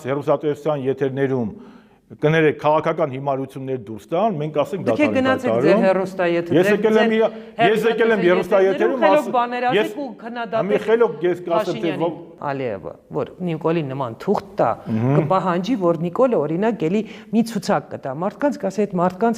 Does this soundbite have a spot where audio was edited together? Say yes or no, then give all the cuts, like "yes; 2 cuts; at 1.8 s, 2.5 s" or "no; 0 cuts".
yes; 1 cut; at 12.4 s